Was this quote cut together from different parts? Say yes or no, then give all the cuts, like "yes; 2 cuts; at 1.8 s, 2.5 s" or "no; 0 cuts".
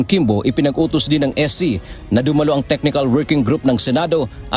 no; 0 cuts